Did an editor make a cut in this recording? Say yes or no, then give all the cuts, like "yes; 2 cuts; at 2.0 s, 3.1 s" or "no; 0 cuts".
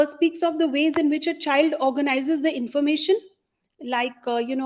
no; 0 cuts